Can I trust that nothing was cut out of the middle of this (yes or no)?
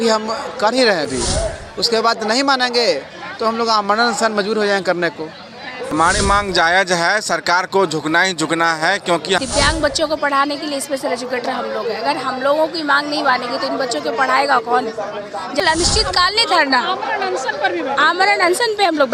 no